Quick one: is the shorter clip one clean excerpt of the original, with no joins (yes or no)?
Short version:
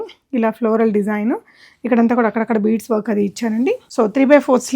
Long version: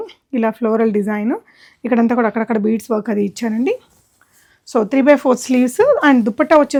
no